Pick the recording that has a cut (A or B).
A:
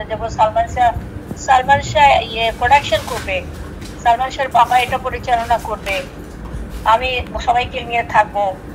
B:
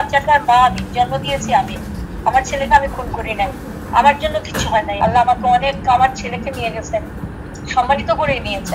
B